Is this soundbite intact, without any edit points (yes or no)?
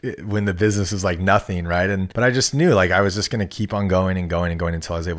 no